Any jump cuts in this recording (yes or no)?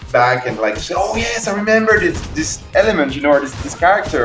no